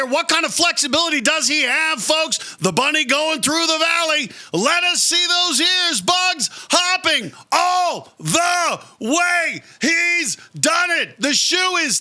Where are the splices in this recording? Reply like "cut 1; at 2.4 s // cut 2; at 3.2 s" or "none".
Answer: cut 1; at 2.5 s